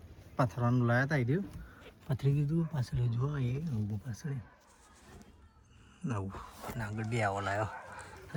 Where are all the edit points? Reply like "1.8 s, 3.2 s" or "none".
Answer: none